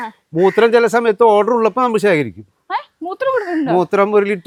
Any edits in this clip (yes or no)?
no